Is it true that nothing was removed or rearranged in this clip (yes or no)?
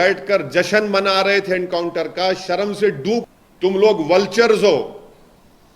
no